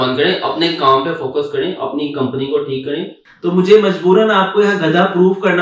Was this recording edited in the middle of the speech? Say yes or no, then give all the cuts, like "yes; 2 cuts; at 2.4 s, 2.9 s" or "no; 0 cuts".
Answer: yes; 1 cut; at 3.2 s